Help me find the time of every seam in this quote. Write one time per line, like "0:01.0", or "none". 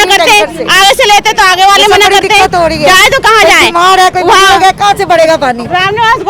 none